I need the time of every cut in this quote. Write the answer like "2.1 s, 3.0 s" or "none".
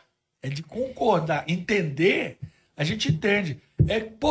none